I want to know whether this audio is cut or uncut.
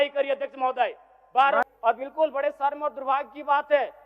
cut